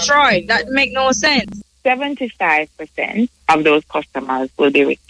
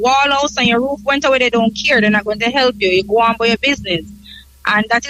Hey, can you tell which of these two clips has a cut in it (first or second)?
first